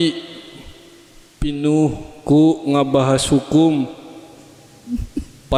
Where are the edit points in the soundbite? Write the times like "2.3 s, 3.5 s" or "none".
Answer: none